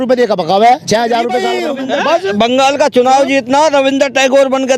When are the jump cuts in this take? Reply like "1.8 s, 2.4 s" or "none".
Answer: 1.6 s